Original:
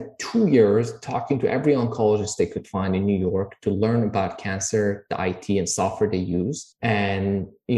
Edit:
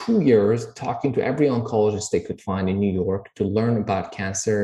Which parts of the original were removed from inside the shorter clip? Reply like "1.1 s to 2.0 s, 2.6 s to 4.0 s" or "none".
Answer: none